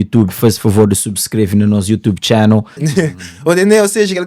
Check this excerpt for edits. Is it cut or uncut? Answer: cut